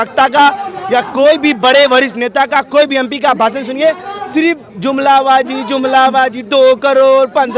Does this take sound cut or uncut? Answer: uncut